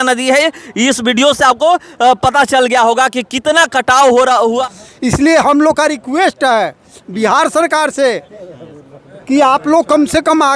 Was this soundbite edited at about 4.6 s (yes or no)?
yes